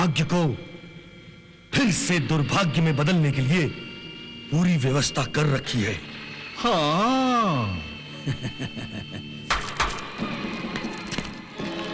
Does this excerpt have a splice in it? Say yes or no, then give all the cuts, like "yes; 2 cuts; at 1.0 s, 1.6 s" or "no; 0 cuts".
no; 0 cuts